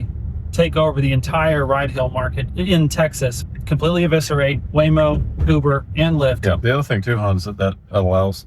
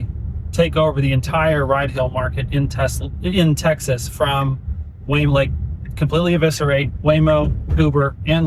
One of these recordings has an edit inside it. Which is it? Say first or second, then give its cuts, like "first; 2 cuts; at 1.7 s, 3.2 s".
first; 3 cuts; at 2.4 s, 3.4 s, 6.6 s